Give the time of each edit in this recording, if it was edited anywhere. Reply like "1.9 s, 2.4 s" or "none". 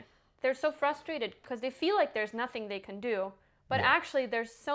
none